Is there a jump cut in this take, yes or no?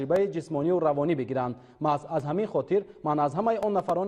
yes